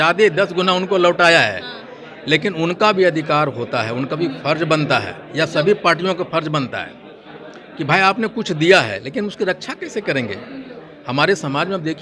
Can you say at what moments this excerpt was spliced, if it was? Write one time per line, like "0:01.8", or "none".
none